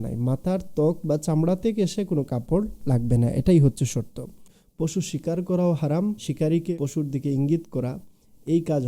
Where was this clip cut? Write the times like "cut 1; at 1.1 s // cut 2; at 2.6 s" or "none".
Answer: cut 1; at 4.6 s // cut 2; at 6.2 s